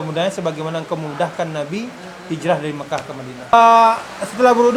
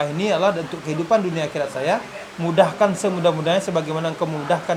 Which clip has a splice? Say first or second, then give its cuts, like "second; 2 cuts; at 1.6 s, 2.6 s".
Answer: first; 1 cut; at 3.5 s